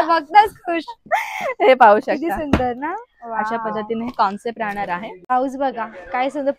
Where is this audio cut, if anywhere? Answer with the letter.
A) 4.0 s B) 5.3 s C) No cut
B